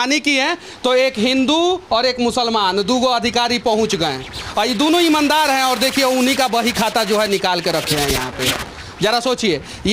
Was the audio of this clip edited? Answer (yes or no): no